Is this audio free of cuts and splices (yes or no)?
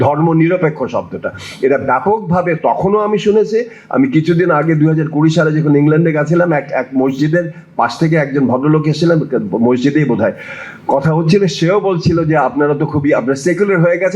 yes